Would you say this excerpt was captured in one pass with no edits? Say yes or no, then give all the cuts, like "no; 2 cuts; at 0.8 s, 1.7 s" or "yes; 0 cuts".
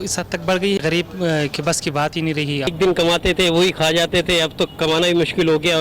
no; 2 cuts; at 0.8 s, 2.7 s